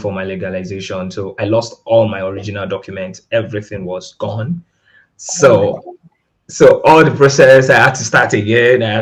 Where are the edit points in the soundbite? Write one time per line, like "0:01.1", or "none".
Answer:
none